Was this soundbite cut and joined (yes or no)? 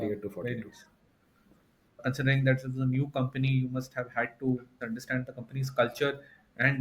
yes